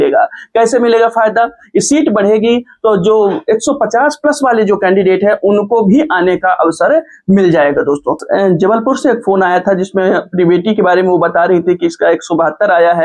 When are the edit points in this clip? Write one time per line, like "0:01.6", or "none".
0:08.2